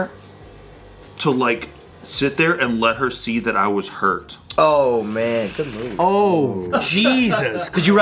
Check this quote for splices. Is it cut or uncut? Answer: uncut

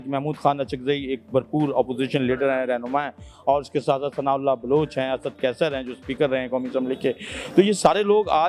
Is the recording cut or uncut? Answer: uncut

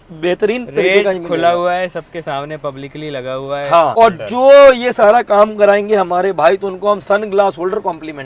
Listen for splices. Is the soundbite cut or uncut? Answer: cut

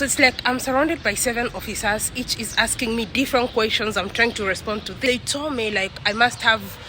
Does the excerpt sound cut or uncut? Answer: cut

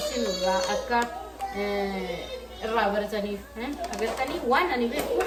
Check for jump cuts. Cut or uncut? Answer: uncut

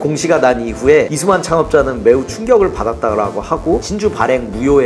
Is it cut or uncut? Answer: cut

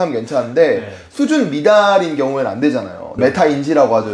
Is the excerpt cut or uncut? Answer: cut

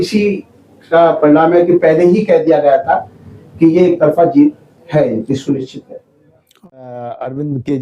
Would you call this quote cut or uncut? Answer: cut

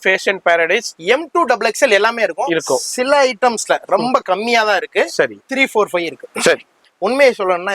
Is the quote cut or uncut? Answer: cut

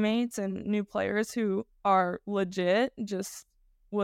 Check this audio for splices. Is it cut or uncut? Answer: cut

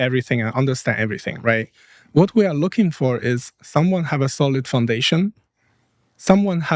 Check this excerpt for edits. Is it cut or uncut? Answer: uncut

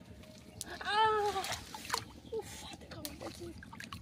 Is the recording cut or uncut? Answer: uncut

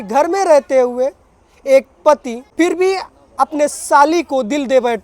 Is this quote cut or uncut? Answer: cut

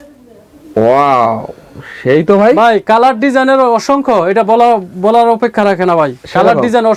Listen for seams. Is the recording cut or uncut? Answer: uncut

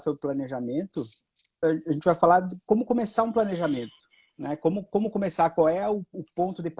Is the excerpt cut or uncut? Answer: cut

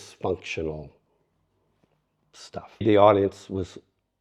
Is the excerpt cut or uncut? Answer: cut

